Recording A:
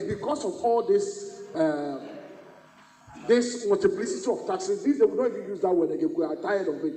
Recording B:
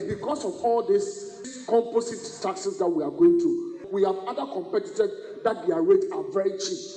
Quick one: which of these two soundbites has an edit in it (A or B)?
B